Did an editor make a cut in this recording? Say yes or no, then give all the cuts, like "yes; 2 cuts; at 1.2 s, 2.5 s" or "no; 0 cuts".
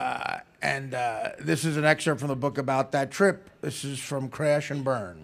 yes; 1 cut; at 3.0 s